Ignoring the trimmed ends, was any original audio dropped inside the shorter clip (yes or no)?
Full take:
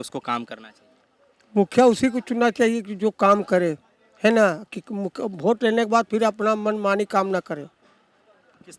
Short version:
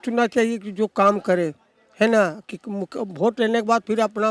no